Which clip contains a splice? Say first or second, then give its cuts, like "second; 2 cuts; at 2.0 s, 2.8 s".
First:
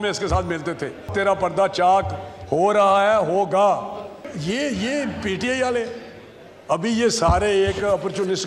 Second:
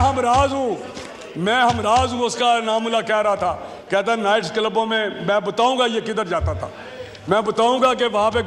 first; 2 cuts; at 1.1 s, 4.3 s